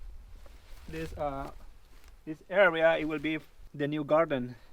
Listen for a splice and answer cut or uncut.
cut